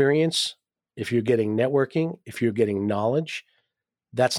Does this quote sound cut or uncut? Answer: uncut